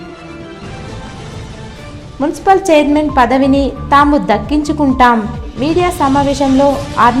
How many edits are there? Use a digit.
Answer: 1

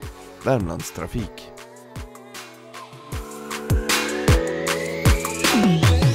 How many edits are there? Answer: 1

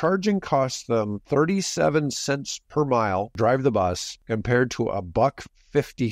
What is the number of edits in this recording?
3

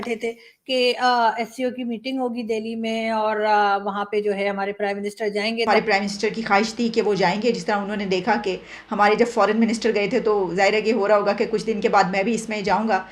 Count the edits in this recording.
1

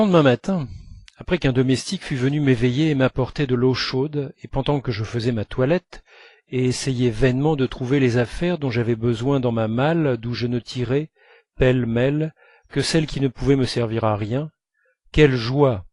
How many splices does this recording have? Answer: 1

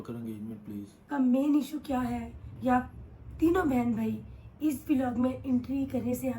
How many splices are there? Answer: 1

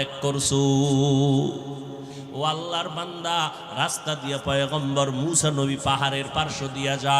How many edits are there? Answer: 1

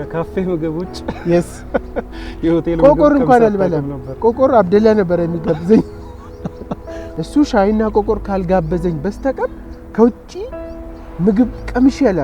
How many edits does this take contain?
0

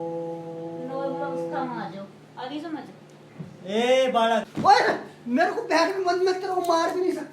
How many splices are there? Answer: 1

